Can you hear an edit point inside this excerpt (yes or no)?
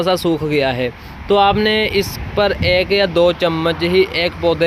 no